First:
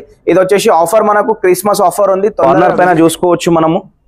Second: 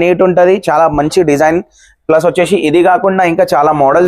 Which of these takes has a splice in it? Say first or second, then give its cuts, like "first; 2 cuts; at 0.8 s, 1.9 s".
first; 1 cut; at 2.4 s